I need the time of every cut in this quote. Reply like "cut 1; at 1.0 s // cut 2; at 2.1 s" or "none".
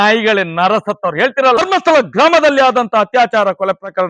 none